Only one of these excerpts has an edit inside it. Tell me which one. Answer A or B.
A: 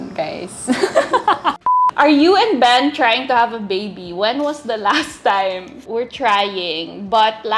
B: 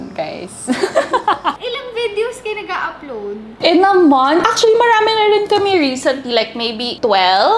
A